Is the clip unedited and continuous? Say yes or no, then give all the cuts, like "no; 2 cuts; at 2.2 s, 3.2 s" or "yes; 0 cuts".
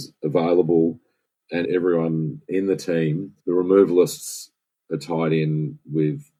yes; 0 cuts